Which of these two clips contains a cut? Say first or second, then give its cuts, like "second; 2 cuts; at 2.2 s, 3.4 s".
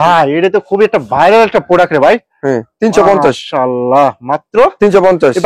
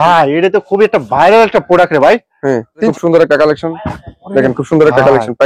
second; 1 cut; at 2.9 s